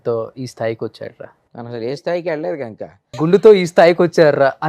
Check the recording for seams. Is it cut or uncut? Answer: cut